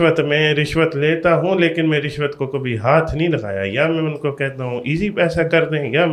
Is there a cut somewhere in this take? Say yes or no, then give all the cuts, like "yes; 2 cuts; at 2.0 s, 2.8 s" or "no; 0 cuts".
no; 0 cuts